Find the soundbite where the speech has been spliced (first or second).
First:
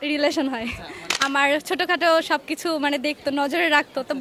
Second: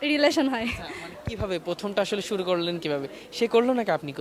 first